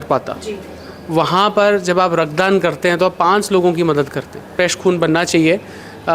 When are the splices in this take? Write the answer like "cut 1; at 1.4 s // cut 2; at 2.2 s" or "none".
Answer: cut 1; at 4.5 s